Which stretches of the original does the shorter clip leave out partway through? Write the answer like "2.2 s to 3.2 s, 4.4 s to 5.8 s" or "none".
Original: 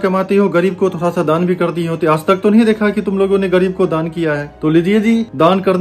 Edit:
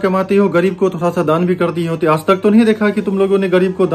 none